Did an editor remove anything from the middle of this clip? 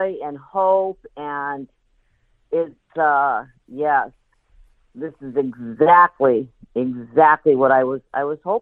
no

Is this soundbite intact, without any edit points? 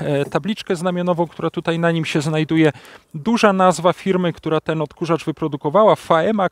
yes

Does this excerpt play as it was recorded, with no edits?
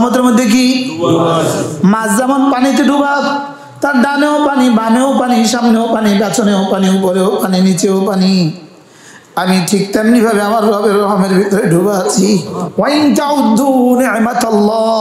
no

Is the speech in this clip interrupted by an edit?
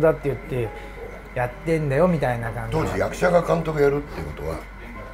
yes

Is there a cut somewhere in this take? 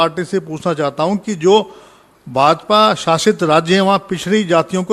no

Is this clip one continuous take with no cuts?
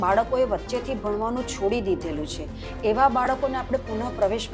yes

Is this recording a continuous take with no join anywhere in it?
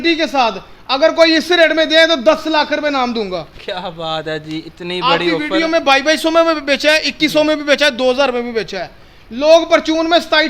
yes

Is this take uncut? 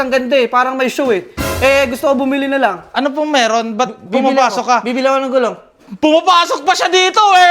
no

